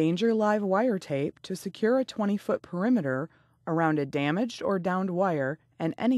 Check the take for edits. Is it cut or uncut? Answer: uncut